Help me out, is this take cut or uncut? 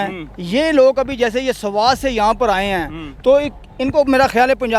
uncut